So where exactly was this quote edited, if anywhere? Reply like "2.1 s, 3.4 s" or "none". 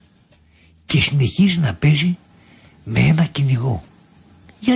none